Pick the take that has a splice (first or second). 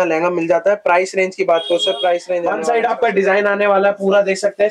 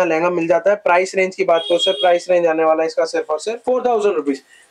first